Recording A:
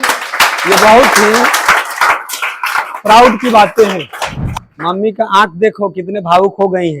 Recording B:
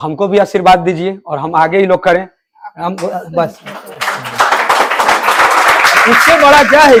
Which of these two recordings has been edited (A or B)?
A